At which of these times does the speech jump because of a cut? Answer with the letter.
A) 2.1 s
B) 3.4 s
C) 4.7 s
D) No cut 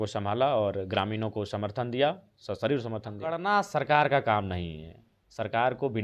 B